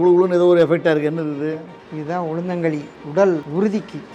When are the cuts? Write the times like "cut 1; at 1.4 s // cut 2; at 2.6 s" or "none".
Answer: cut 1; at 3.0 s